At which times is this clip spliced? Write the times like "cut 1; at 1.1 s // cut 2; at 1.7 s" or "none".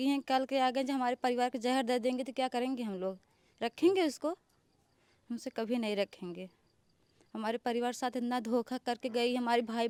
none